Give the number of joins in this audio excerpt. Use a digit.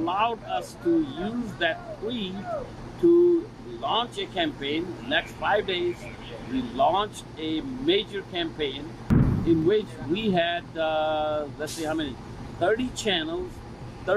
0